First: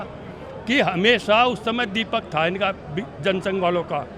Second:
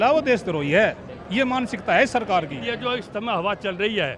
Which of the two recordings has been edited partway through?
second; 1 cut; at 2.6 s

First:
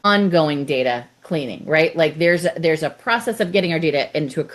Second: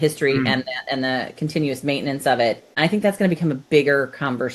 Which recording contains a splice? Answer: second; 1 cut; at 2.7 s

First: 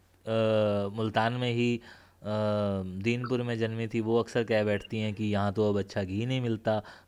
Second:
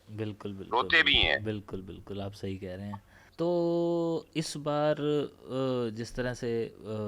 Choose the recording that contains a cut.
second; 1 cut; at 3.2 s

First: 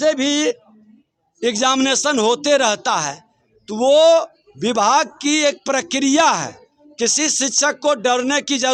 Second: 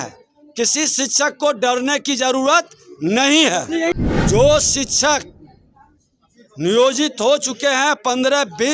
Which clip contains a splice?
second; 1 cut; at 3.9 s

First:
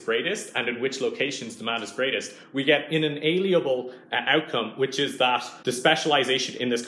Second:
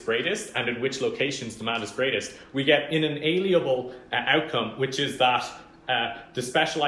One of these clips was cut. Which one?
first; 1 cut; at 5.5 s

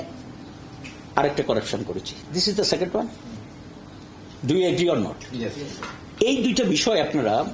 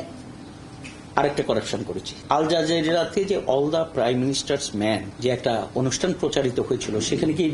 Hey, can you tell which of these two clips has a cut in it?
second; 2 cuts; at 2.1 s, 5.1 s

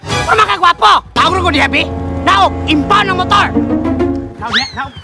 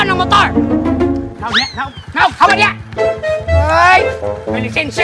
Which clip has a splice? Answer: first; 1 cut; at 1.1 s

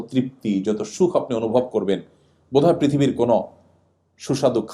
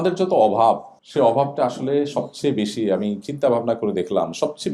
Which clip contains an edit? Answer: second; 1 cut; at 1.0 s

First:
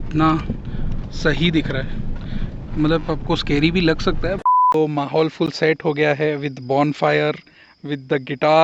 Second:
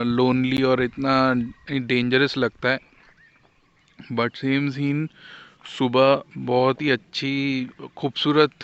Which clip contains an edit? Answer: first; 1 cut; at 4.6 s

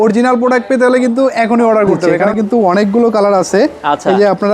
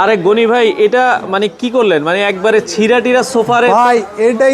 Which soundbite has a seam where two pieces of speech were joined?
first; 1 cut; at 2.2 s

